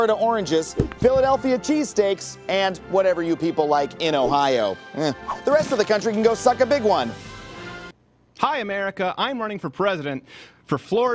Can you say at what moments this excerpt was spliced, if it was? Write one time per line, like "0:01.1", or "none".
0:07.8

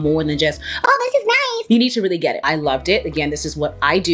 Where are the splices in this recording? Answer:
0:02.4

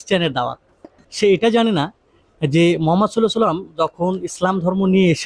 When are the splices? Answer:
0:01.0

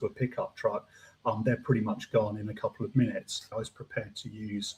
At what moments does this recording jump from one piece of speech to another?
0:03.4

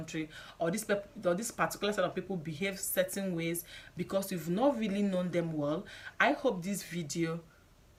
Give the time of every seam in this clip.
none

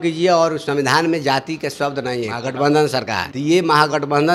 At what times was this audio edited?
0:02.4
0:03.2

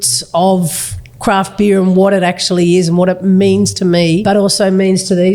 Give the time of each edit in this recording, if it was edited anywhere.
0:04.2

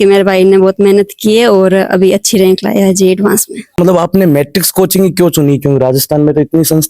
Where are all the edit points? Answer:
0:03.8

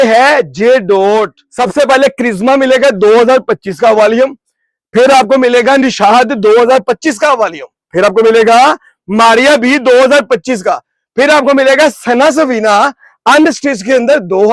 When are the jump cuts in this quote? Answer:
0:01.4

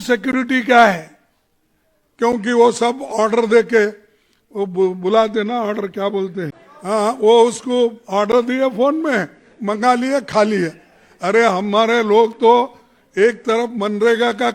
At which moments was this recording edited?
0:06.7

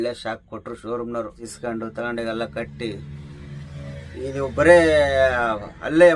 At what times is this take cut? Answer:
0:01.5

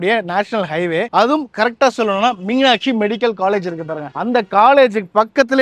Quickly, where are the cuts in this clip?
none

